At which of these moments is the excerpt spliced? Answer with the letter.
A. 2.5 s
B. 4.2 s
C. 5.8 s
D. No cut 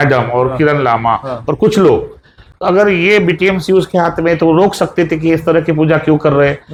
D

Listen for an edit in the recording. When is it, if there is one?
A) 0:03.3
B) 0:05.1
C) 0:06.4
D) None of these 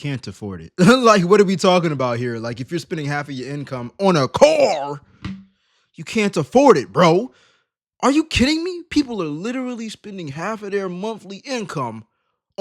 D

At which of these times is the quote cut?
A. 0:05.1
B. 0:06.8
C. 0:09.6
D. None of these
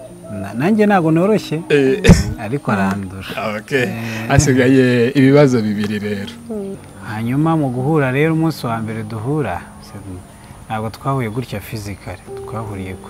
B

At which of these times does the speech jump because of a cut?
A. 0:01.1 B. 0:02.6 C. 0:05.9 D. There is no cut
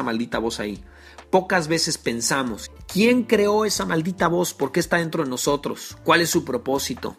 B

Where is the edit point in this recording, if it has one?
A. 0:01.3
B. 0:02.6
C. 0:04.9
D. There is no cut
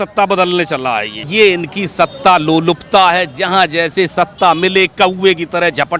A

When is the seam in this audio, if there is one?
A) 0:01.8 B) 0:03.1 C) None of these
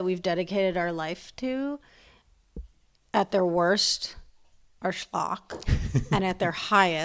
C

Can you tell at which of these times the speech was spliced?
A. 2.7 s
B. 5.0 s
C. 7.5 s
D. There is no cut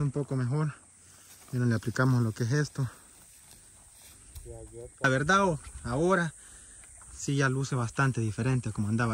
B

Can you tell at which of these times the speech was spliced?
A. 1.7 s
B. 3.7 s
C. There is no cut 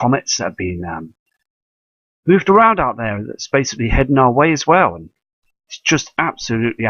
B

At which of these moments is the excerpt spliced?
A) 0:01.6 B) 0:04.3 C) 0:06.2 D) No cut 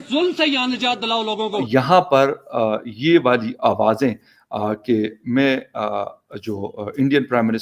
A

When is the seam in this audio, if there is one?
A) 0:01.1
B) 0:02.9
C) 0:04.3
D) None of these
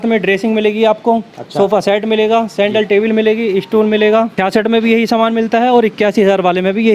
C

